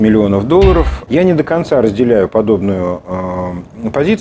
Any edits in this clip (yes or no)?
yes